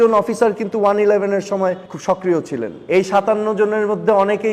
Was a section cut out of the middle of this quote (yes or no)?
yes